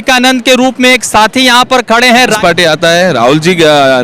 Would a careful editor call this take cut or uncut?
cut